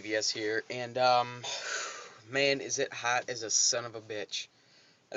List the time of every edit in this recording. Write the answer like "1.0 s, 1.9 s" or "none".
none